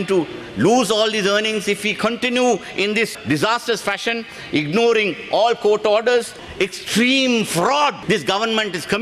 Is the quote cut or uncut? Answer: cut